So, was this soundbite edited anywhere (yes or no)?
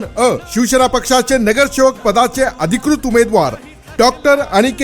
yes